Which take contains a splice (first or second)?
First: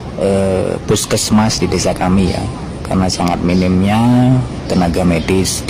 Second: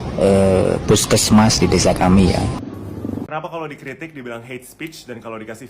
second